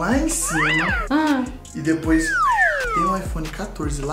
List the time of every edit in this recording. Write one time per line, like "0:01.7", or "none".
0:03.0